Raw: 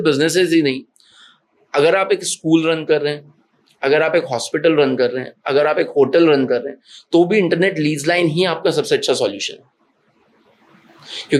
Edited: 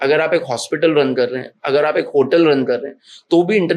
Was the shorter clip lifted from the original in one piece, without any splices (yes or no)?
yes